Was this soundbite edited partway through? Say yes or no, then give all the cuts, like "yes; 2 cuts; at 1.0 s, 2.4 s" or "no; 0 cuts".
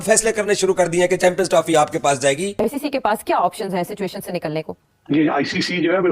yes; 2 cuts; at 2.5 s, 4.8 s